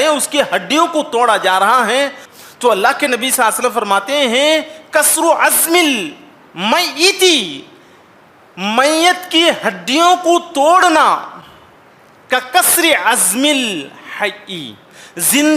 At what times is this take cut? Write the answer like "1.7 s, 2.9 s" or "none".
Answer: 2.2 s